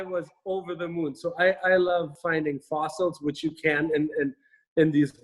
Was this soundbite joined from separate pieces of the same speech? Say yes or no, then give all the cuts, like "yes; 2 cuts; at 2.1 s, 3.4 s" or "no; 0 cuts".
yes; 1 cut; at 2.2 s